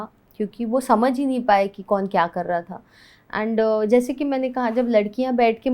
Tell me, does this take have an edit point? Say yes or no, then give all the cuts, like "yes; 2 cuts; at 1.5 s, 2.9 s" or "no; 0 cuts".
no; 0 cuts